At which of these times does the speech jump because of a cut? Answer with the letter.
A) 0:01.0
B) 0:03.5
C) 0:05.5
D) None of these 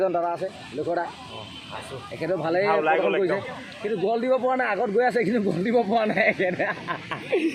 D